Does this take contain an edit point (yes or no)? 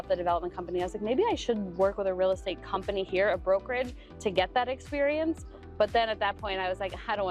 no